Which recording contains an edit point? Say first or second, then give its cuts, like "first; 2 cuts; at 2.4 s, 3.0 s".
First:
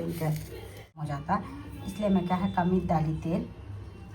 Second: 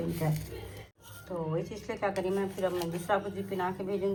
first; 1 cut; at 1.1 s